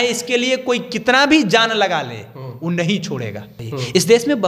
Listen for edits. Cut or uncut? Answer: cut